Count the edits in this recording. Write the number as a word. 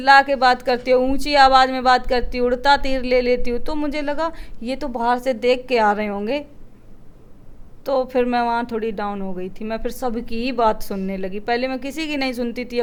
zero